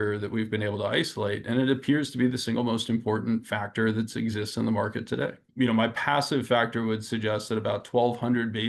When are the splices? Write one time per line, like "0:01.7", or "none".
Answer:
0:05.4